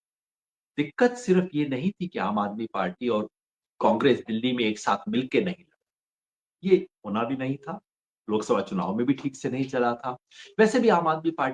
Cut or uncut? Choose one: uncut